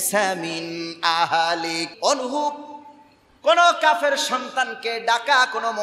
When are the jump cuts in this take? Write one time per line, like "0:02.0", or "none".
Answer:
0:01.9